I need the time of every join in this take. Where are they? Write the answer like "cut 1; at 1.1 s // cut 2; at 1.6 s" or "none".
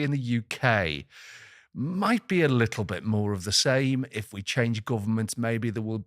none